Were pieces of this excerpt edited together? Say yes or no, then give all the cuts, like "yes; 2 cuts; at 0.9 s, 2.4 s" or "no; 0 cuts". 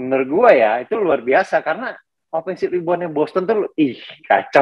no; 0 cuts